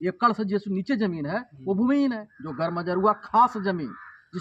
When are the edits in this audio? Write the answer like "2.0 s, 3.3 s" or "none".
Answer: 2.1 s